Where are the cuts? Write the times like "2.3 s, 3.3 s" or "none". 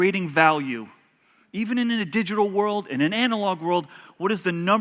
2.9 s

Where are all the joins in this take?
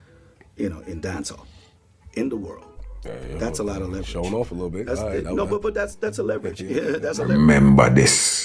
7.3 s

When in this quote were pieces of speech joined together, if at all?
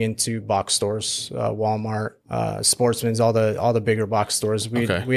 2.2 s

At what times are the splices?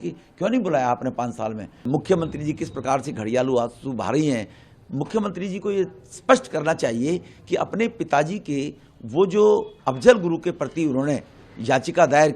1.8 s

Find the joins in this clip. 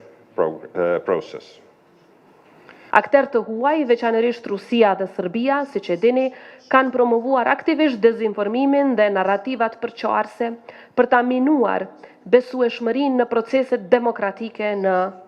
2.8 s

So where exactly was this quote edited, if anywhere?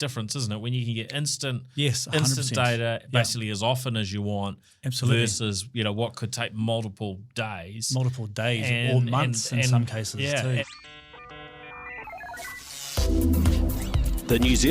10.6 s

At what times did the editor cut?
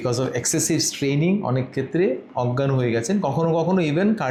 none

